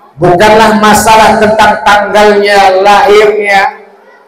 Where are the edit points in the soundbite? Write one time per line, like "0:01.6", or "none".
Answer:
none